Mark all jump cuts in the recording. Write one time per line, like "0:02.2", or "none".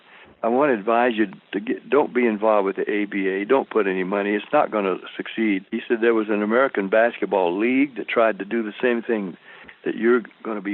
0:05.7